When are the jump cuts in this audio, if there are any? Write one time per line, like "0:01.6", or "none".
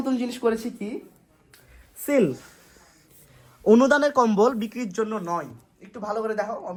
none